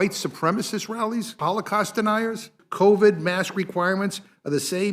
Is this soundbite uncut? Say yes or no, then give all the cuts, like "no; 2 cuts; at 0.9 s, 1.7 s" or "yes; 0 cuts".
no; 2 cuts; at 1.4 s, 2.6 s